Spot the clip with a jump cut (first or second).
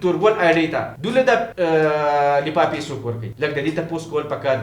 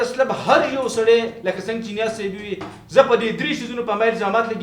first